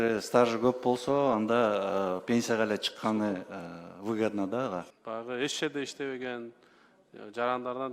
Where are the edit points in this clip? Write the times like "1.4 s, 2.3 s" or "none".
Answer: 5.0 s